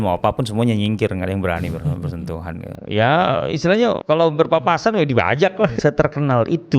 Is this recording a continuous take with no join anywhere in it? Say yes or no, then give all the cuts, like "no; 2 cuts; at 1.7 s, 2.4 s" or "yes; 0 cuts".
no; 2 cuts; at 4.0 s, 5.8 s